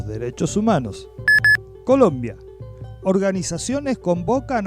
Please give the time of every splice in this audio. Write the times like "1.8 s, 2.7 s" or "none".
1.0 s

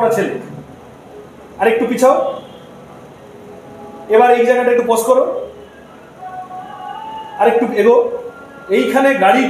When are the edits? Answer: none

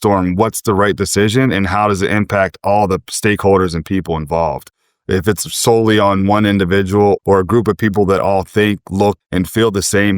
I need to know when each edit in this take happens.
7.2 s, 9.2 s

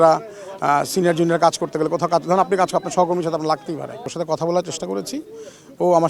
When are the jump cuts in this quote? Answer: 4.1 s

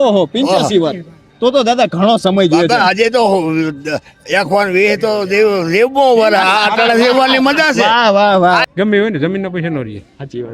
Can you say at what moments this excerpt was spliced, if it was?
8.6 s

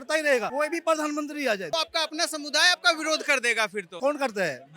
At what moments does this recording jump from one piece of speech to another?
1.7 s

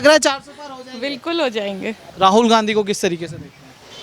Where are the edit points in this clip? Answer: 2.1 s

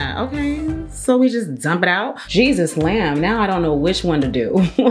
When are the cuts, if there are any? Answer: 2.1 s

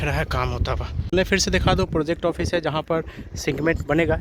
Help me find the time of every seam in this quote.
none

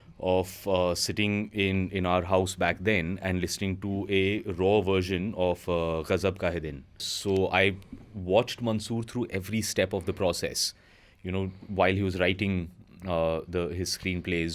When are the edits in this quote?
7.1 s

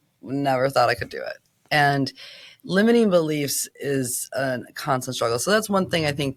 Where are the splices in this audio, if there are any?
none

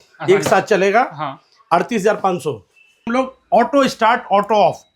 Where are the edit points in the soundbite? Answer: 3.1 s

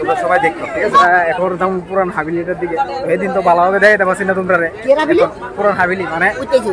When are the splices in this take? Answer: 1.0 s, 5.3 s

